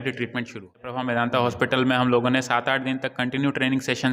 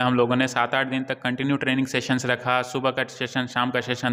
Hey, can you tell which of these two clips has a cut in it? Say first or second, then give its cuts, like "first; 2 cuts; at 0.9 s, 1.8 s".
first; 1 cut; at 1.0 s